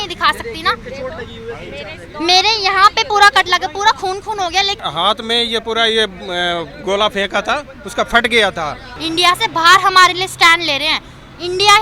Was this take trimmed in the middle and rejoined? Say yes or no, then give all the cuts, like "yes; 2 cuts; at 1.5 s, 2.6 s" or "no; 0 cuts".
no; 0 cuts